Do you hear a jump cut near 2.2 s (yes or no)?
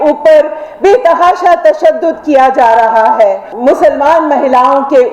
no